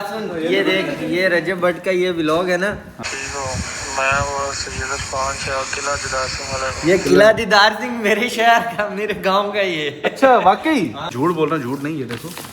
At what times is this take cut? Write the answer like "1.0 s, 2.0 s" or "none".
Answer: 2.9 s, 11.1 s

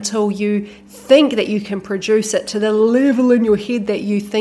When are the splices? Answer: none

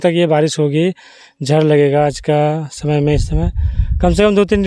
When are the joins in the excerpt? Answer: none

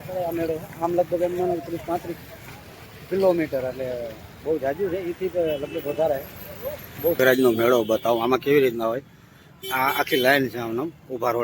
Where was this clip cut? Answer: 7.2 s

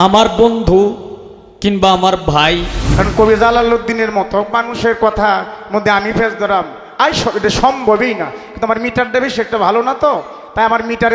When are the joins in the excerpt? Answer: 2.8 s

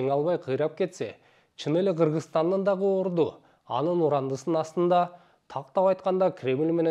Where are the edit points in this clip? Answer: none

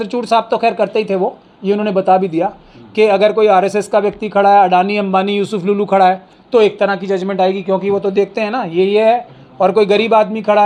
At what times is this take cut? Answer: none

